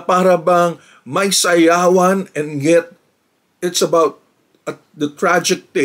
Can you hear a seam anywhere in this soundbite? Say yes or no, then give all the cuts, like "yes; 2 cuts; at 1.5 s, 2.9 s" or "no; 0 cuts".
no; 0 cuts